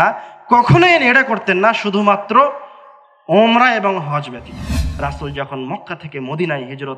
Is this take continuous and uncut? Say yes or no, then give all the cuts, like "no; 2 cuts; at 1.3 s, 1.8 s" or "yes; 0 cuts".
no; 1 cut; at 4.8 s